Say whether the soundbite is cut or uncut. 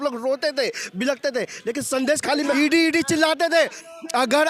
cut